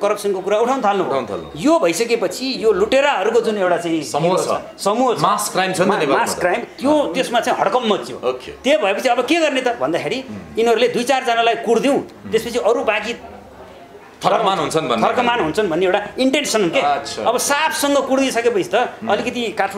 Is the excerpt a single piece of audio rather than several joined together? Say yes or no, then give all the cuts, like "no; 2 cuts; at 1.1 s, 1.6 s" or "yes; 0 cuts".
yes; 0 cuts